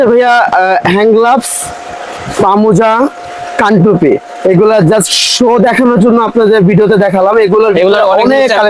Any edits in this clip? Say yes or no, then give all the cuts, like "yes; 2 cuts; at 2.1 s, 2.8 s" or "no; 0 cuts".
no; 0 cuts